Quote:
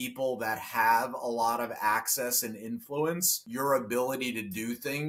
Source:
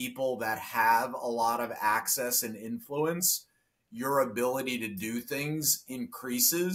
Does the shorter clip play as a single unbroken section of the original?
no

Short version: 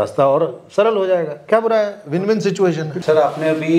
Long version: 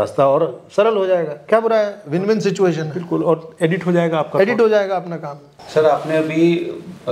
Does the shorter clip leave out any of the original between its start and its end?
yes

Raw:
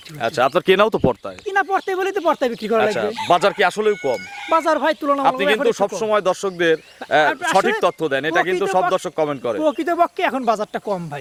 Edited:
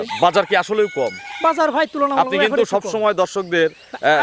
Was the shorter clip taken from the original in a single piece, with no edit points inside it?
yes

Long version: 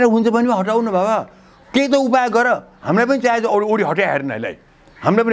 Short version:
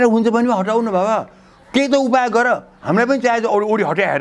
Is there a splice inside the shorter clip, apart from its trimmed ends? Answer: no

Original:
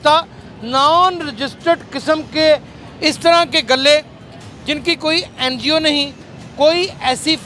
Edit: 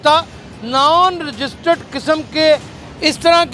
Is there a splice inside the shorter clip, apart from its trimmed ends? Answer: no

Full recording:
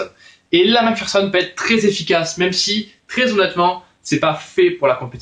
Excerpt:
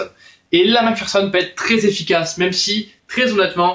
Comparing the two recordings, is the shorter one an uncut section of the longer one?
yes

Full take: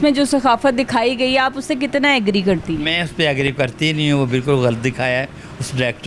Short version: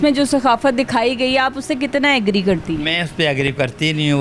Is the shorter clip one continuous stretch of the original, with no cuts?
yes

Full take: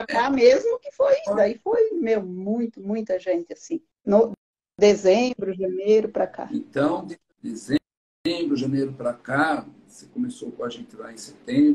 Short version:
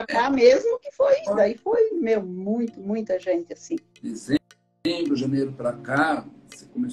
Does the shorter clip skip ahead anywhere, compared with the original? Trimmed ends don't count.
yes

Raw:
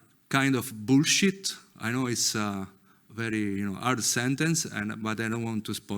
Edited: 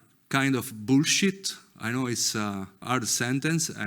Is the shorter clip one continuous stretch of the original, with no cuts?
no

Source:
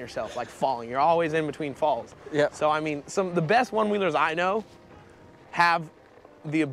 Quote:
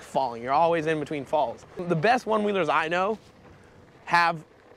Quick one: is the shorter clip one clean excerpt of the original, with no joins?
no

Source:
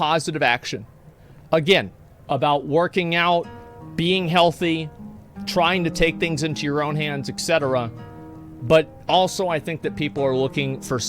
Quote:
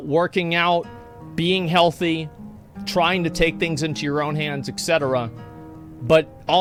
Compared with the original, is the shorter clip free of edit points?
yes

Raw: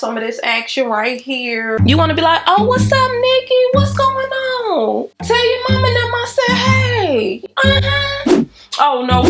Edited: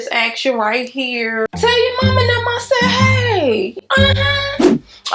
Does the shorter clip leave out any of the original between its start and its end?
yes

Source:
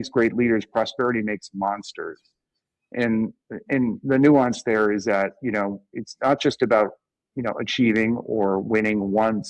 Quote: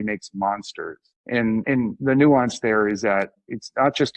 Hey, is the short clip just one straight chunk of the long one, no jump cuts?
no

